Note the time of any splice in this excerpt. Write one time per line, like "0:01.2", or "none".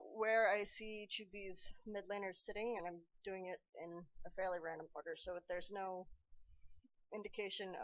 none